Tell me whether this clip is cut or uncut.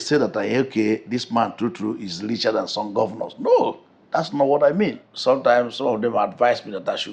cut